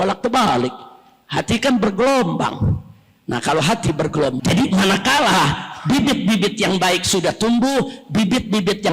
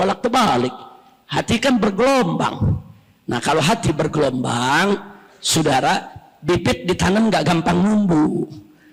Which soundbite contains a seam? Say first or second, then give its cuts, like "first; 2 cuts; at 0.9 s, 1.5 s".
first; 1 cut; at 4.4 s